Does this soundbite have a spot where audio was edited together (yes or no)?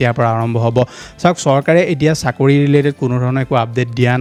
no